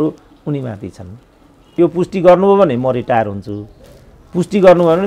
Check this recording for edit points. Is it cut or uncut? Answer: cut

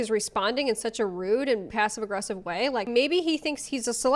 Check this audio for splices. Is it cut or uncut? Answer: cut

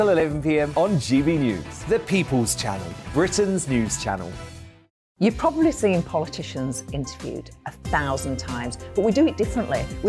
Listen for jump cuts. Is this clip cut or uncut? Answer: uncut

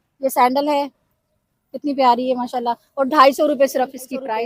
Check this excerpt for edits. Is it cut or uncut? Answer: uncut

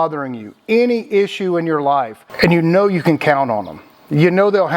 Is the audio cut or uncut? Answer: uncut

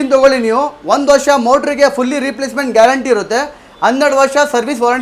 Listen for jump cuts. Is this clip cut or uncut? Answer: uncut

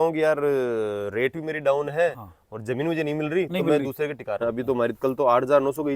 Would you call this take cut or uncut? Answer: cut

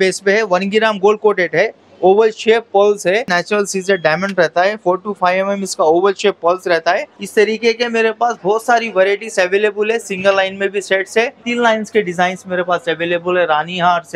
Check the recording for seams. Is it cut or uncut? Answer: cut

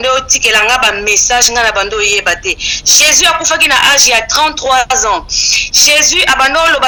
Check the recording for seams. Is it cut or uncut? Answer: uncut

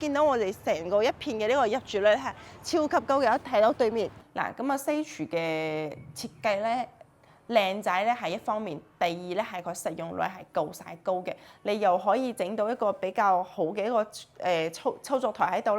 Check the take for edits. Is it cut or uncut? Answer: cut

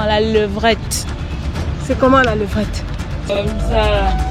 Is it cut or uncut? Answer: cut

